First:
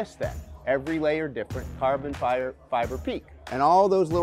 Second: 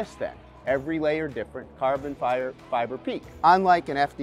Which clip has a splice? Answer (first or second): first